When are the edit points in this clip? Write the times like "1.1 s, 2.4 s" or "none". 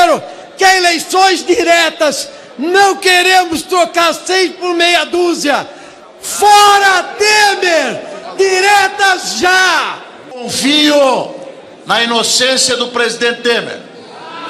11.6 s

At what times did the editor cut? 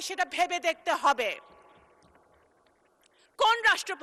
none

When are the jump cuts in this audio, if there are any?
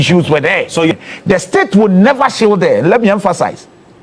0.9 s

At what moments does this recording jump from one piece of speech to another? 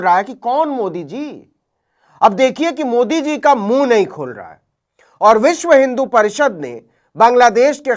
none

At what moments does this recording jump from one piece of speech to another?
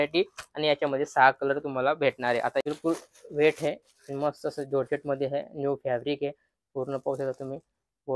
2.6 s

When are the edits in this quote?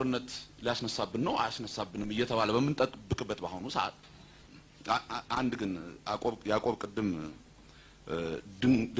4.3 s

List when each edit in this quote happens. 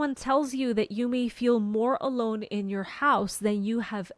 none

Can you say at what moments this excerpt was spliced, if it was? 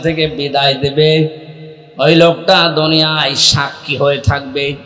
none

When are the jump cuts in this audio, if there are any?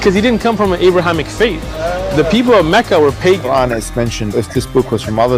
4.4 s

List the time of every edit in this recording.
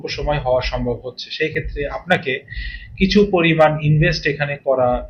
none

